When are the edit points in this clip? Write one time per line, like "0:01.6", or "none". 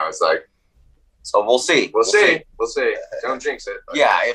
none